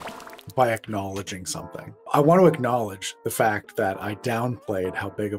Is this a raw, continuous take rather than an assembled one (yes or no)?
no